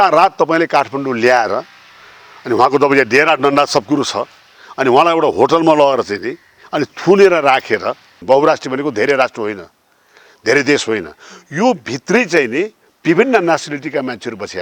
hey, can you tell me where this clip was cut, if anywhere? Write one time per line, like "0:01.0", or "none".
0:08.1